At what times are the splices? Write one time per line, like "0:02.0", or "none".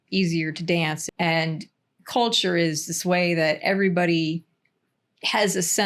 0:01.0

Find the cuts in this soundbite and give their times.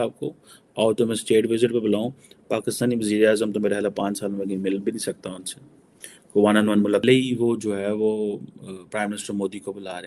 0:07.0

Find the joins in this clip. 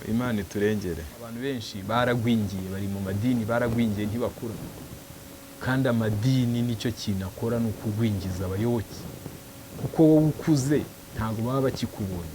0:01.4

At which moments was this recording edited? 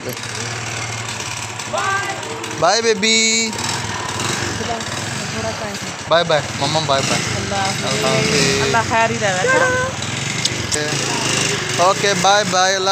none

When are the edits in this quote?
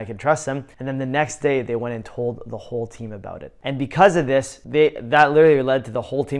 0:03.6

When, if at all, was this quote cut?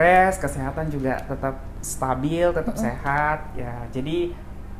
none

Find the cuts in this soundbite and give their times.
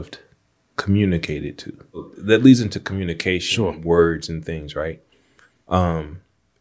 0:02.1

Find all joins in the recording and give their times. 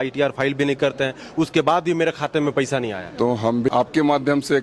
0:03.7

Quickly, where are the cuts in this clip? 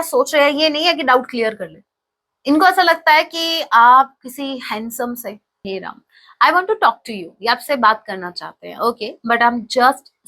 0:05.6

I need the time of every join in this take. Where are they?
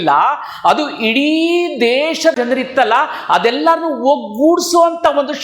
0:02.3

